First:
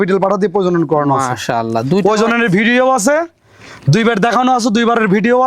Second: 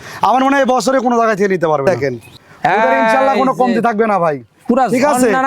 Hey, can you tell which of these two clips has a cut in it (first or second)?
second